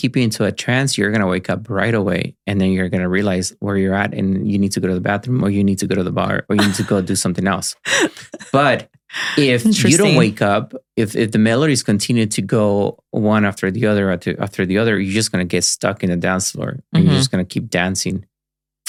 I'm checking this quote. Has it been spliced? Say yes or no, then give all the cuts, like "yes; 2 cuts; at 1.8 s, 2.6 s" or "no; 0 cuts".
no; 0 cuts